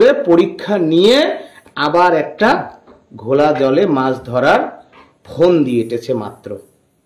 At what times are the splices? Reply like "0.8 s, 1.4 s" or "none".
none

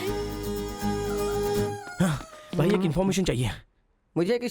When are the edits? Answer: none

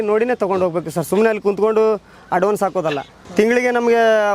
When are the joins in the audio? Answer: 3.2 s

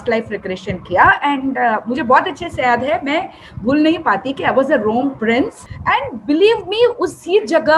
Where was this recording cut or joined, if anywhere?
5.7 s

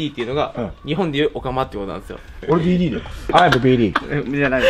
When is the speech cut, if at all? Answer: 2.2 s, 3.3 s

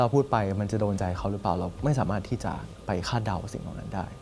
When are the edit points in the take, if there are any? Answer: 1.7 s, 2.7 s

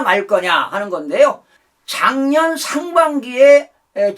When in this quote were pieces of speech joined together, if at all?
1.5 s

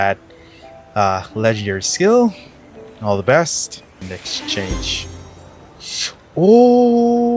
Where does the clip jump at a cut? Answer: 4.1 s

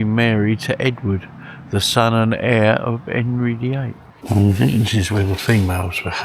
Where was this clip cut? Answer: 4.0 s

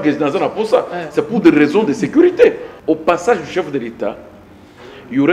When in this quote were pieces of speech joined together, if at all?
2.7 s

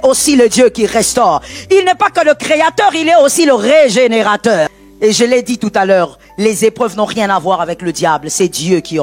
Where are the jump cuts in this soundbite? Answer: 4.8 s

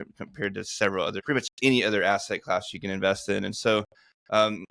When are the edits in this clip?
1.2 s

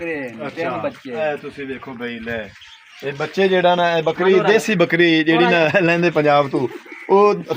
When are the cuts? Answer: none

